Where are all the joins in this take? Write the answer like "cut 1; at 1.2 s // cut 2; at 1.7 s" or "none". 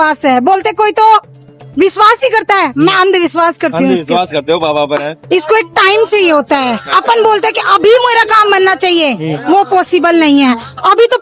cut 1; at 5.1 s